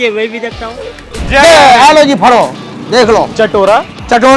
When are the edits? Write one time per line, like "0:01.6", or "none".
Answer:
0:01.2
0:03.3

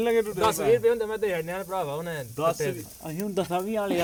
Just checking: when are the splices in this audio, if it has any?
none

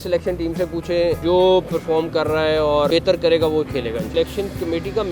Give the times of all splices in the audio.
0:01.2
0:02.9
0:04.1

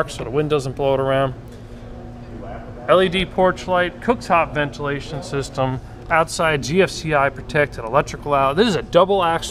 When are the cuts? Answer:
0:04.7

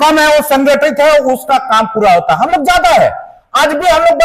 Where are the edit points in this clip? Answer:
none

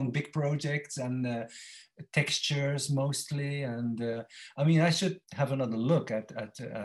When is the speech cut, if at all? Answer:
none

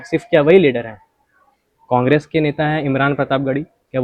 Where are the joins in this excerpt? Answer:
none

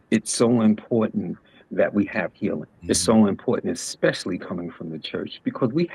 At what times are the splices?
0:02.7

